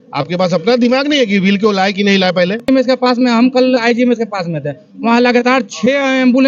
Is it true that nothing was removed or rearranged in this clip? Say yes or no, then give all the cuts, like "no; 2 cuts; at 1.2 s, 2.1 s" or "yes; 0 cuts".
no; 1 cut; at 2.7 s